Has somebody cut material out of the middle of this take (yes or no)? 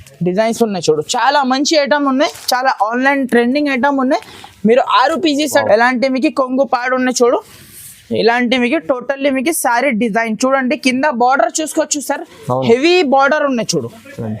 yes